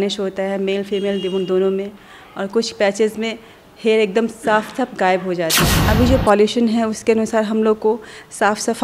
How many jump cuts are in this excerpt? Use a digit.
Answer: 1